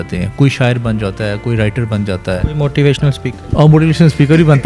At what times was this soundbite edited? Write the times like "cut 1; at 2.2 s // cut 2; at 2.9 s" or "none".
none